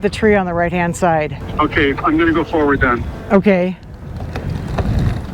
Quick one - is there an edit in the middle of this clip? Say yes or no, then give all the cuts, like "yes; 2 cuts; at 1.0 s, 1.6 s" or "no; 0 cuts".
yes; 1 cut; at 1.4 s